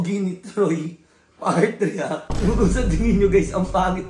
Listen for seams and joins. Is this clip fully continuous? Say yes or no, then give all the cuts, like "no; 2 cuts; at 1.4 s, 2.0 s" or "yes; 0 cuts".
no; 1 cut; at 2.3 s